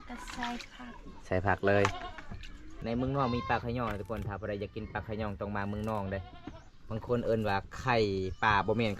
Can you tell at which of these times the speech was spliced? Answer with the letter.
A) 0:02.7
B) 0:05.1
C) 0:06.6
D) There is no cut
A